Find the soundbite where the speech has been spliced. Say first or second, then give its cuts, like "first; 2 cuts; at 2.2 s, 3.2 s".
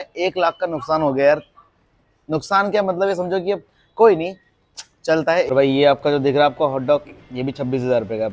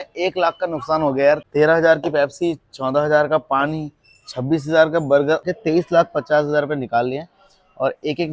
second; 2 cuts; at 1.5 s, 5.4 s